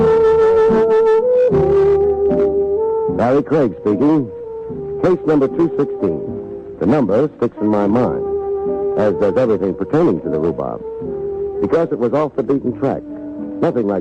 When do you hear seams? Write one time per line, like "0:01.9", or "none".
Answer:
0:11.9